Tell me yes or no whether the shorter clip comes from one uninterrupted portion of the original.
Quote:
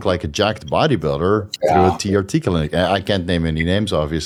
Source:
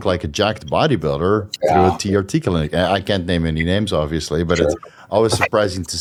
yes